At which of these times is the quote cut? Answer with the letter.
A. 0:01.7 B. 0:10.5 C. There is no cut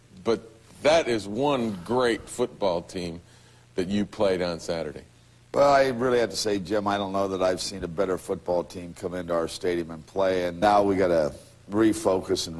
C